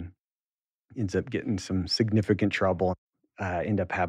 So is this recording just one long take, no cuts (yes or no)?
no